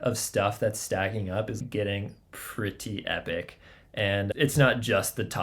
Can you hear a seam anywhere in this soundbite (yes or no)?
yes